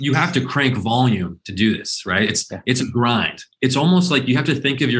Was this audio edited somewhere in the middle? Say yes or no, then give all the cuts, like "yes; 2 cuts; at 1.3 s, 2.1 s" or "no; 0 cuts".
yes; 1 cut; at 3.4 s